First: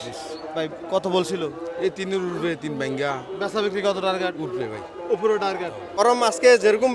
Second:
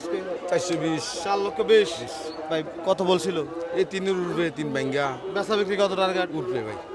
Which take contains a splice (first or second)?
first